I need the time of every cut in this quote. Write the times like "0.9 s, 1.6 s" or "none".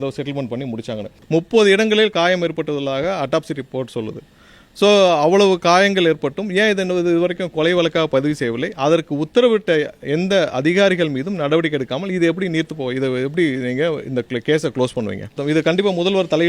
1.1 s, 15.3 s